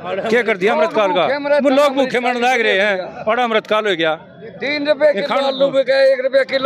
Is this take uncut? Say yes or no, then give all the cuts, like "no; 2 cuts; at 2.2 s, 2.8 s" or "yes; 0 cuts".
yes; 0 cuts